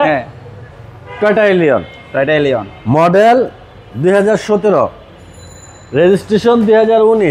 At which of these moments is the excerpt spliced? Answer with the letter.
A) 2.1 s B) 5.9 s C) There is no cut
C